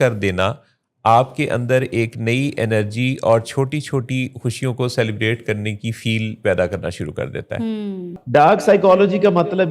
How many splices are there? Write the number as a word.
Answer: one